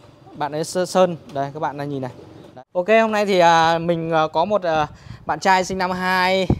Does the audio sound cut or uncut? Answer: cut